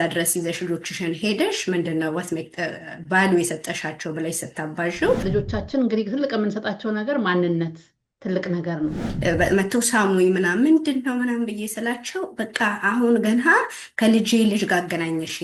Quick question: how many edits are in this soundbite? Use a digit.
2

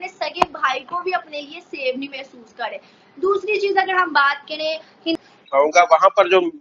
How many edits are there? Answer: 1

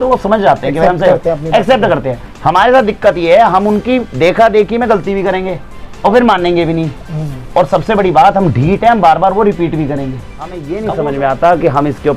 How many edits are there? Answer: 1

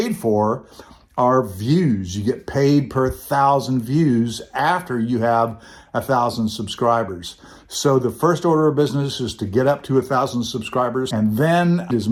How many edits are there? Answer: 0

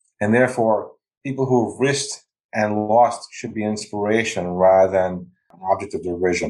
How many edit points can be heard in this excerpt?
1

